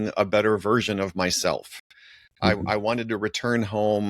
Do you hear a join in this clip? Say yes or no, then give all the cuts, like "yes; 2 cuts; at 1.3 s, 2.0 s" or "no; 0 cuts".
no; 0 cuts